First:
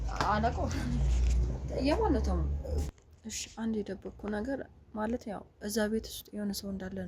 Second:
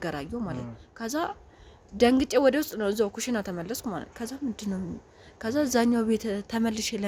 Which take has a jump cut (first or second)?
first